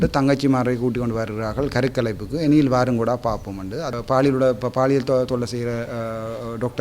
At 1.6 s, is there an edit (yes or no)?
no